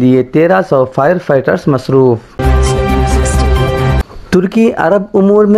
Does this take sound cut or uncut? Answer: cut